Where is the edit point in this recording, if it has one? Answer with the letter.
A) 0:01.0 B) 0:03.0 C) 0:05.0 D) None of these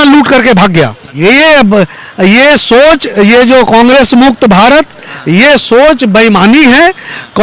A